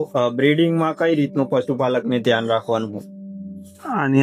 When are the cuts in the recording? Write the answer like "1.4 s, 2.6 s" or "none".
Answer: none